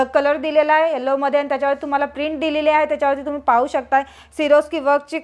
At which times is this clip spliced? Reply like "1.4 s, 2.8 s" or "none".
none